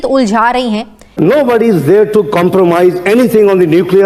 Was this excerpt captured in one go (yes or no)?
no